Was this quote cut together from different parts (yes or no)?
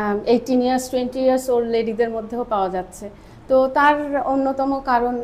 no